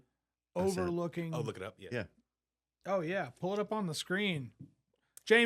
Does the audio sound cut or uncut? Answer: uncut